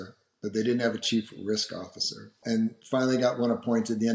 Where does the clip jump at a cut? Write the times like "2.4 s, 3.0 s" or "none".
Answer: 2.4 s